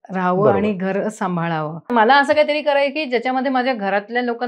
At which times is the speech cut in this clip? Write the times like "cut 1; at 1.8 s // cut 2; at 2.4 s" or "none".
cut 1; at 1.9 s